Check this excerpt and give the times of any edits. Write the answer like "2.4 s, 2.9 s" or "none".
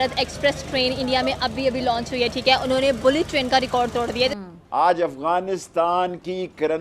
4.4 s